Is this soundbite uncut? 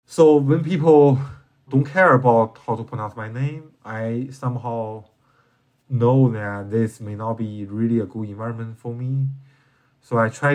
no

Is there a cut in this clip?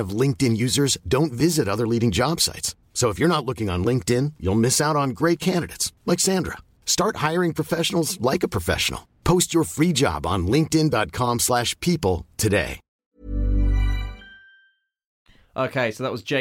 no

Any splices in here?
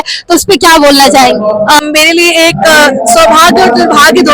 yes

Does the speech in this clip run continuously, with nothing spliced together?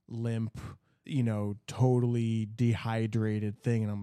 yes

